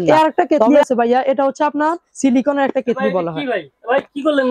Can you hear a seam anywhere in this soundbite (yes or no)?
no